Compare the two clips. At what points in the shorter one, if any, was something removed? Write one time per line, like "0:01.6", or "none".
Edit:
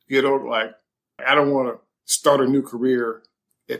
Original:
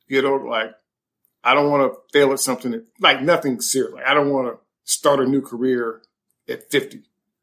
0:01.2